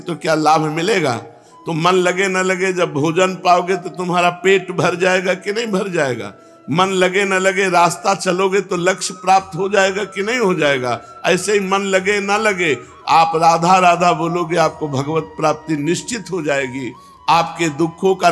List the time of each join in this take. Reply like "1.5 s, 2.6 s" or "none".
none

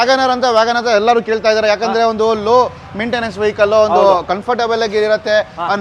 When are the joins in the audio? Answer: none

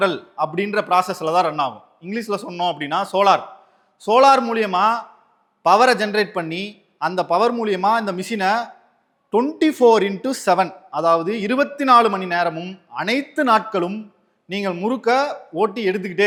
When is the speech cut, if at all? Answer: none

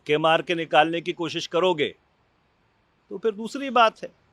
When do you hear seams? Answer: none

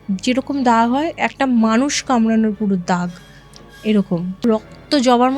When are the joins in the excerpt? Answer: 4.4 s

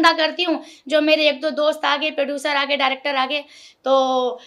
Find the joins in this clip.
none

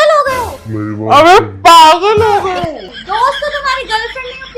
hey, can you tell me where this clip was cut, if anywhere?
none

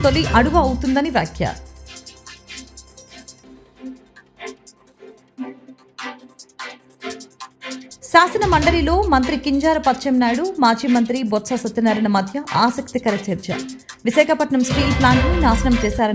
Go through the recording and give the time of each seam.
1.5 s

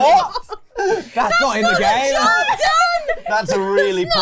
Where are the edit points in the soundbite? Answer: none

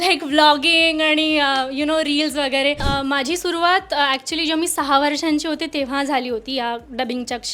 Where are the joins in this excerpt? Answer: 2.8 s

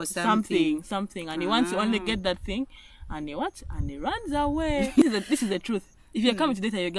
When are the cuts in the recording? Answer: 5.0 s

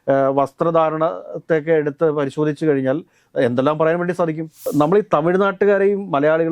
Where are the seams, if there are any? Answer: 4.7 s

